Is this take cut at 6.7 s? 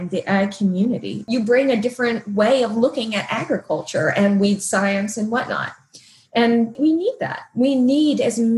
yes; 2 cuts; at 1.2 s, 6.7 s

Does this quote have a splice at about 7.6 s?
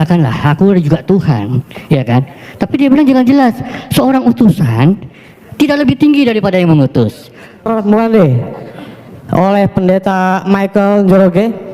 yes; 1 cut; at 7.6 s

